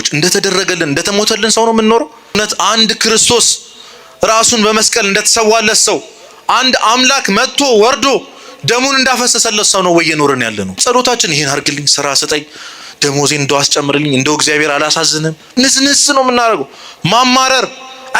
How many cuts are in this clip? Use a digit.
3